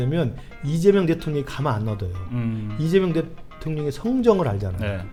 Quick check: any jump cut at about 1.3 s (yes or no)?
no